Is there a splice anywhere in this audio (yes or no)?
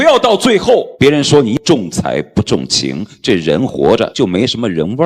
yes